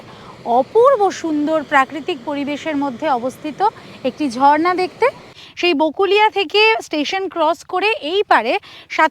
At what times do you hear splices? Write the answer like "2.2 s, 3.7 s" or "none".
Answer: 5.3 s